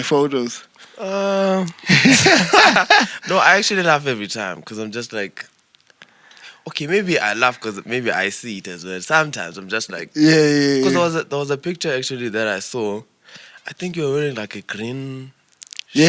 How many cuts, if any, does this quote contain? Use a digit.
0